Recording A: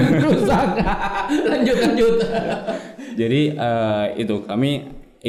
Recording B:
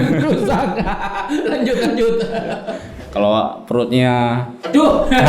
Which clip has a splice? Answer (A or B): B